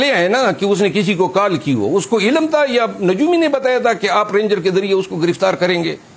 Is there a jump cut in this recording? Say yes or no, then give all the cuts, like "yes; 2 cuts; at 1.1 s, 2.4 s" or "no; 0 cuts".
no; 0 cuts